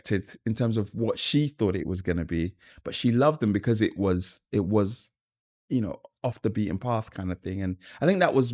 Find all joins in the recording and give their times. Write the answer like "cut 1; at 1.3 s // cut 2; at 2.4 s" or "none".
none